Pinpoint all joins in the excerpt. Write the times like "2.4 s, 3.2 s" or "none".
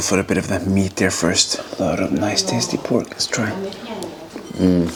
none